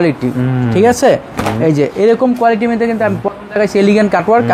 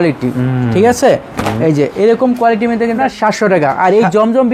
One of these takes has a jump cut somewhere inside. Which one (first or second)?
second